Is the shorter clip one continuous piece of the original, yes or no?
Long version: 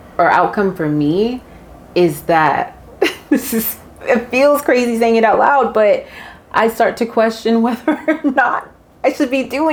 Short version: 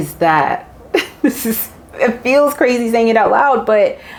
yes